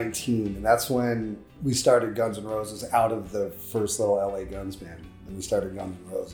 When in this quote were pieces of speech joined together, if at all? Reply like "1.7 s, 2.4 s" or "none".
1.6 s